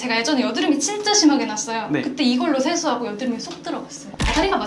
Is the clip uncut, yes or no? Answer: yes